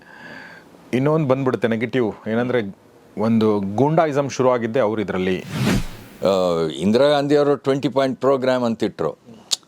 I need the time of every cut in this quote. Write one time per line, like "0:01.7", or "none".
0:05.7